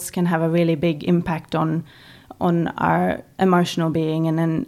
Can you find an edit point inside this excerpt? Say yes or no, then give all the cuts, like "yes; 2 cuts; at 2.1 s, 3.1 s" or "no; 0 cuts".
no; 0 cuts